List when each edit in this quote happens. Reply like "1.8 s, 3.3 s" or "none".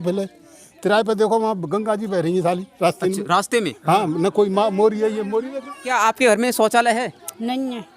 5.9 s